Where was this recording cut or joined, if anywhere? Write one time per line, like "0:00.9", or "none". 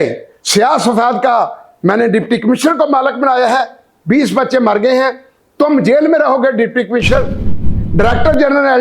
0:07.5

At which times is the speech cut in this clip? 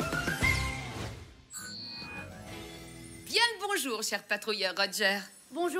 0:03.2

